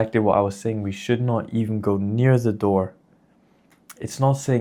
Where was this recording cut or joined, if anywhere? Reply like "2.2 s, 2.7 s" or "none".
none